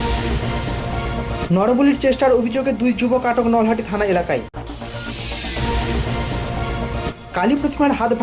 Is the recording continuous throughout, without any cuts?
no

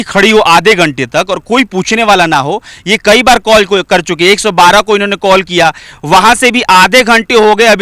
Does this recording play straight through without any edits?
yes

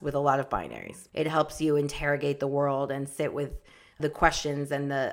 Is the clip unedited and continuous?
no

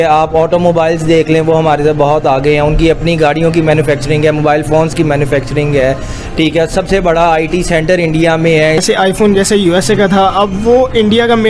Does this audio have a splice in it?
yes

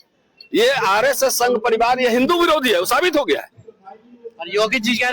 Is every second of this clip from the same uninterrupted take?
yes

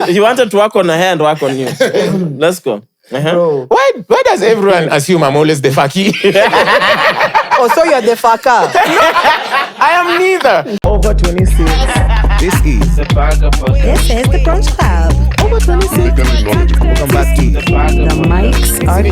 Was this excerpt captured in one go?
no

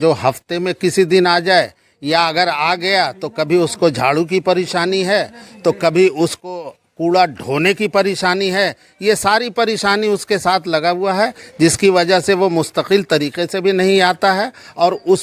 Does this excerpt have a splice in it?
no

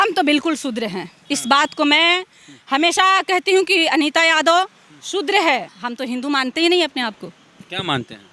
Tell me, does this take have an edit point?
yes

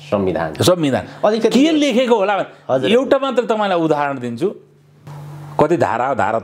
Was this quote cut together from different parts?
no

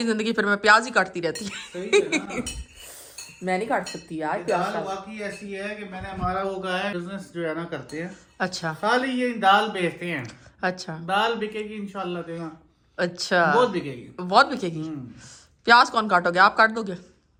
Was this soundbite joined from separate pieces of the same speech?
no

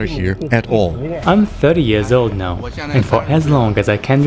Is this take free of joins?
no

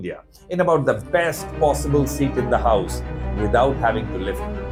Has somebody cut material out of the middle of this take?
no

